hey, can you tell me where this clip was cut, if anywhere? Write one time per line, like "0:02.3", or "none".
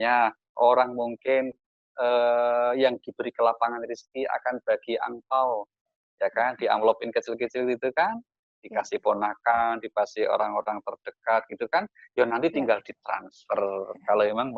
none

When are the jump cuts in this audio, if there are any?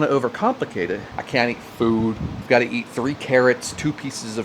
0:01.1
0:02.3

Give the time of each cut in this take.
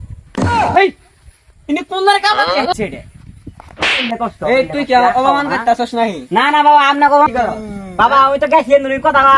0:07.3

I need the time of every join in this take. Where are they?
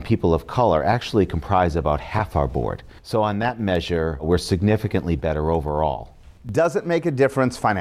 none

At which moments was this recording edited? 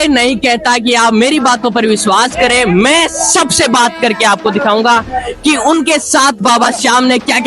none

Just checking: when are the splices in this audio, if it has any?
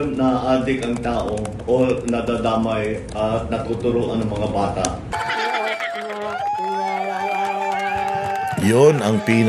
0:05.2

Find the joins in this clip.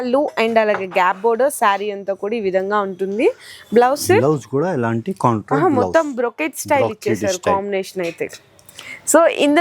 none

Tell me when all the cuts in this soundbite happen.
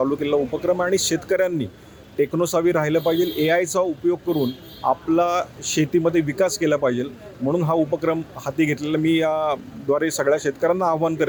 none

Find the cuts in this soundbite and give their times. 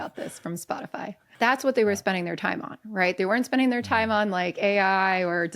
0:01.2

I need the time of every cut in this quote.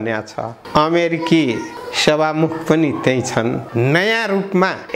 0:03.6

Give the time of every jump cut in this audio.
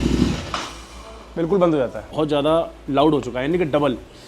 0:02.1

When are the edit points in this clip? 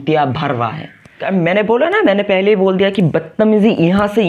0:01.3

